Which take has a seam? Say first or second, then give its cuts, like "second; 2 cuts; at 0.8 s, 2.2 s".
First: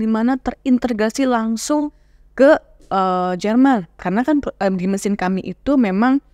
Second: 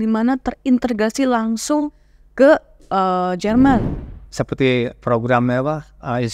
second; 1 cut; at 3.9 s